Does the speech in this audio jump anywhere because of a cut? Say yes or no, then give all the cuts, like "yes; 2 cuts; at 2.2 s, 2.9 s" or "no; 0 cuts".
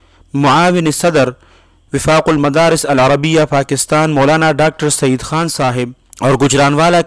yes; 1 cut; at 6.0 s